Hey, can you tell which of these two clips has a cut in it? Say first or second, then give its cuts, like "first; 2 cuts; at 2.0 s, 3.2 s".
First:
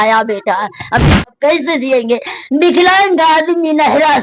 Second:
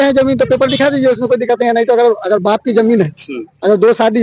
first; 1 cut; at 1.0 s